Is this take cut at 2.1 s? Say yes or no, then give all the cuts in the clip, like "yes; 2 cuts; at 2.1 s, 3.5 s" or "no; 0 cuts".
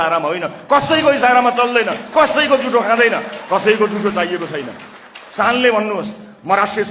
no; 1 cut; at 3.3 s